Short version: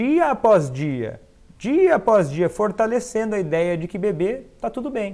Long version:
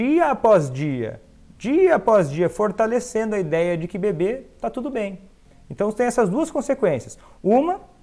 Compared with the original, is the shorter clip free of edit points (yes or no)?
yes